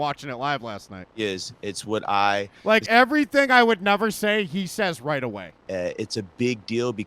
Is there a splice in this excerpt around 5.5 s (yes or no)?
yes